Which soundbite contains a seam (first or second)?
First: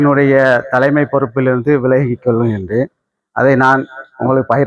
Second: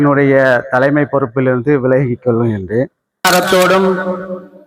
second